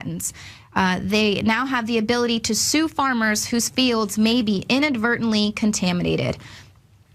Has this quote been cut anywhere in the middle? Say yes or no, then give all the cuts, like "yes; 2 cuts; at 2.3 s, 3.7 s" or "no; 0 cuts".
no; 0 cuts